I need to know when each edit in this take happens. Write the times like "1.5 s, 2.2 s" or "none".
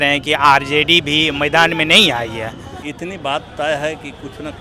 2.8 s